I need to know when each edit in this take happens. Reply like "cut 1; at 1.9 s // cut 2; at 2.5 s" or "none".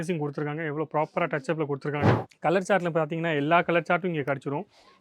cut 1; at 2.2 s